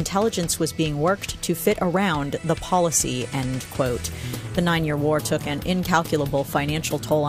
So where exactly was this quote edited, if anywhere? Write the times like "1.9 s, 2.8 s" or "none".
none